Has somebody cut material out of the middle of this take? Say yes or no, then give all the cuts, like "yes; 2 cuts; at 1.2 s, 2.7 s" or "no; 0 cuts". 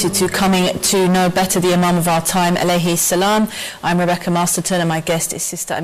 yes; 1 cut; at 2.6 s